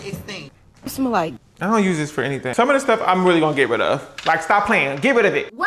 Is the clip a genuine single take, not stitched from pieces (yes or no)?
yes